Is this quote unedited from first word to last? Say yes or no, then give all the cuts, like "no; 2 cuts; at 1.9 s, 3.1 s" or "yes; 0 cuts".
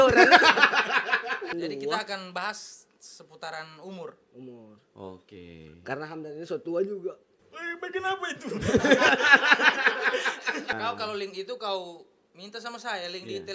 no; 2 cuts; at 1.5 s, 10.7 s